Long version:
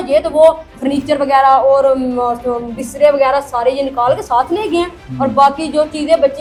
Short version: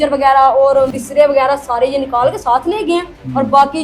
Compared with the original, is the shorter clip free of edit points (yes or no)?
no